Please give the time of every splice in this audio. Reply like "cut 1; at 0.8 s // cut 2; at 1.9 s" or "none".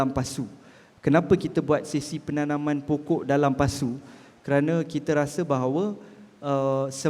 none